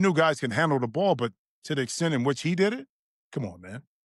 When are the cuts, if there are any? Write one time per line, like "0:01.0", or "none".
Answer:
none